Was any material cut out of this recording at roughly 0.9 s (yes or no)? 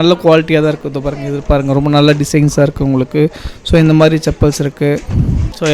no